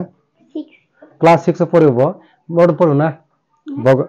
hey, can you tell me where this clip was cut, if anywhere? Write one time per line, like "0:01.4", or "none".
none